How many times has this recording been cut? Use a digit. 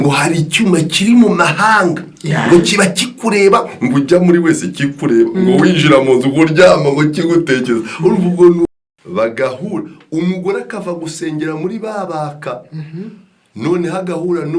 1